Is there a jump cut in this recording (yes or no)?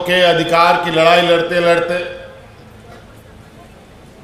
no